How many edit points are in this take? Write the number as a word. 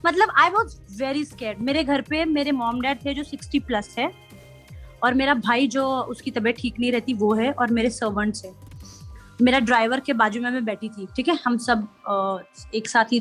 zero